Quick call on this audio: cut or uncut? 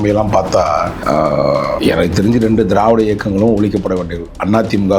cut